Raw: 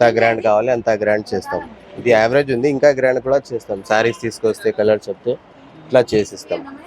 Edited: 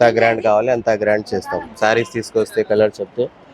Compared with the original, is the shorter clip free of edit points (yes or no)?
no